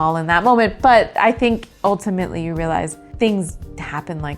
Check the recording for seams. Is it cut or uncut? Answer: cut